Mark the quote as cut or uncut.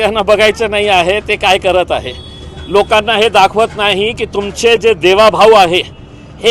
uncut